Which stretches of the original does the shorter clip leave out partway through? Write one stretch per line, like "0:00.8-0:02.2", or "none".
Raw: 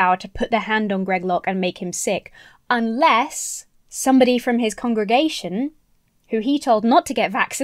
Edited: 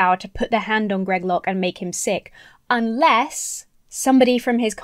none